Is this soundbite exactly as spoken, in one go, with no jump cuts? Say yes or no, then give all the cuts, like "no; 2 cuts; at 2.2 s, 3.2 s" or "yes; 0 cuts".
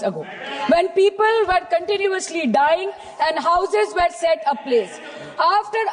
yes; 0 cuts